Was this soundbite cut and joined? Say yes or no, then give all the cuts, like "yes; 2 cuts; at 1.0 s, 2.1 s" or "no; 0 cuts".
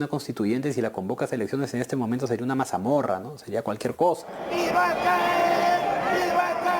yes; 1 cut; at 4.4 s